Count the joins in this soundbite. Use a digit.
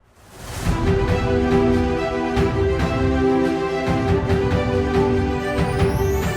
0